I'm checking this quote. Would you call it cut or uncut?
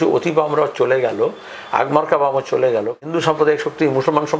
cut